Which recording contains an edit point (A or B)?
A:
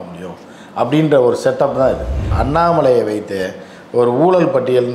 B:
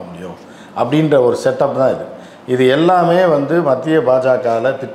A